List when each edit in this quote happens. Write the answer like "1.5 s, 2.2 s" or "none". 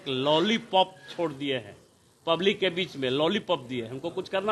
none